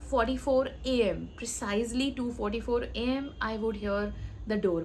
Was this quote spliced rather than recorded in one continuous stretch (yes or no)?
no